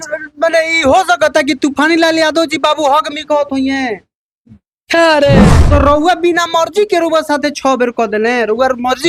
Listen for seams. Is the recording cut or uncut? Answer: cut